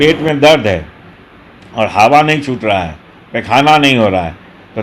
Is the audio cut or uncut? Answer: uncut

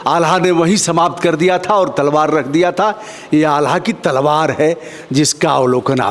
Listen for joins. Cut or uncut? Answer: uncut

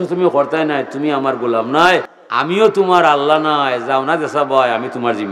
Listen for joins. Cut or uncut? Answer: cut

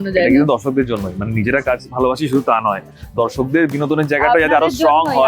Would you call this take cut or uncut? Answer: uncut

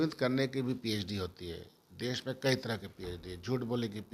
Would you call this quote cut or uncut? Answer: uncut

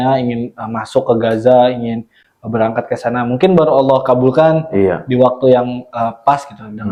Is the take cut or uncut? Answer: uncut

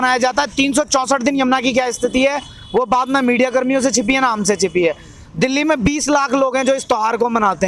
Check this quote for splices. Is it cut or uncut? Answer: uncut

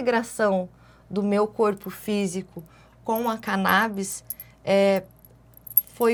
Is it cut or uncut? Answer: uncut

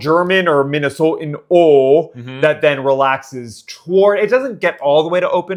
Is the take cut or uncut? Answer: uncut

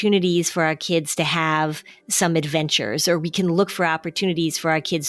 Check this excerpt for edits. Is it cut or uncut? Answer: uncut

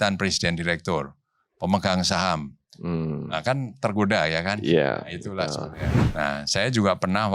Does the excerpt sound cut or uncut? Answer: cut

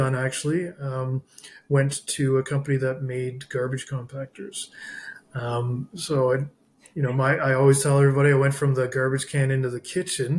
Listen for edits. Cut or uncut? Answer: uncut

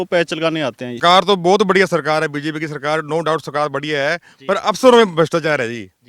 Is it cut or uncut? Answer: cut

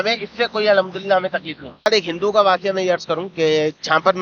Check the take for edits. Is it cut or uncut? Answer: cut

